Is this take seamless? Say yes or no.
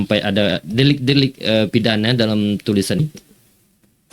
no